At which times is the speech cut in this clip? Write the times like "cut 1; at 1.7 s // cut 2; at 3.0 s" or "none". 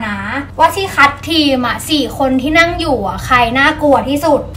none